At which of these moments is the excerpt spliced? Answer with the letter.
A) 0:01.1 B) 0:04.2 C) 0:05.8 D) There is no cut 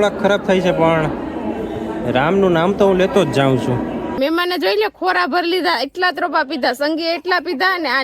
B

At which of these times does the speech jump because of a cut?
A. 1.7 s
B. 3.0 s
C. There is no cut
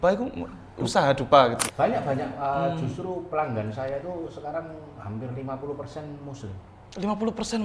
A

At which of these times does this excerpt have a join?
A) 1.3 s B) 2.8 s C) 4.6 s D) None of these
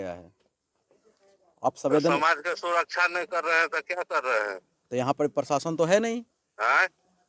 D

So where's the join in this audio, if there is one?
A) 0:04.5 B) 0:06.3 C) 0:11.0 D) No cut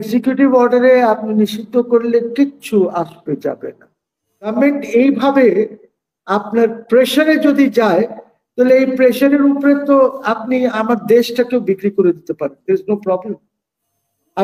A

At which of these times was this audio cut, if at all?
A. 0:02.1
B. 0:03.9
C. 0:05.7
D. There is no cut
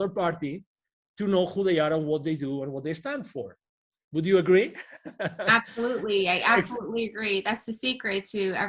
D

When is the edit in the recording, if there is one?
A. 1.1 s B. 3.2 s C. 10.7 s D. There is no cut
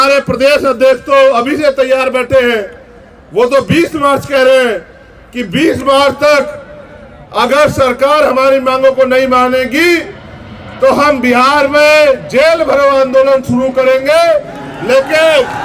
D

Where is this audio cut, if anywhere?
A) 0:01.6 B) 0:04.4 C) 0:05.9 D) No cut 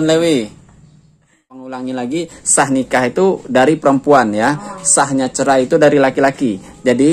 A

